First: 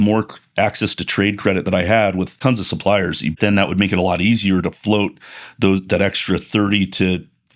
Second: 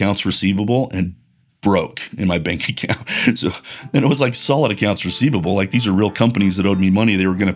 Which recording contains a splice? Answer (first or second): first